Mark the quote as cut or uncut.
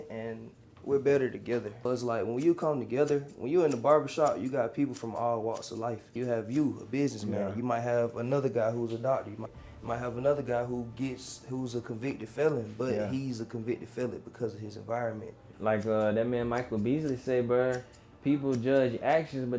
cut